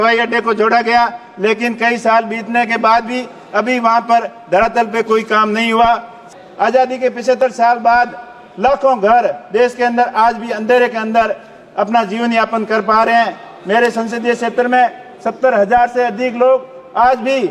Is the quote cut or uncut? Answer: cut